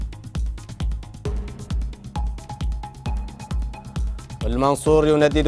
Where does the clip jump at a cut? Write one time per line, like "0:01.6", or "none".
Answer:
none